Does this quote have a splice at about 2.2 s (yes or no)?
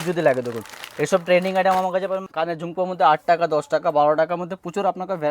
yes